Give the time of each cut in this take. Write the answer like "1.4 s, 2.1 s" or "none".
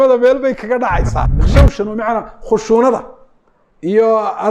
1.4 s